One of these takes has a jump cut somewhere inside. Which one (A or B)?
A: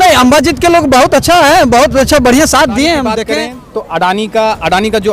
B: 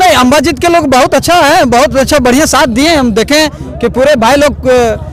A